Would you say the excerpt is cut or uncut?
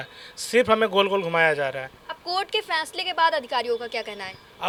uncut